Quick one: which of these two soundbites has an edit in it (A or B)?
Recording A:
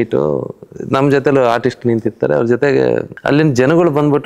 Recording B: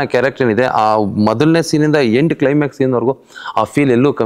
A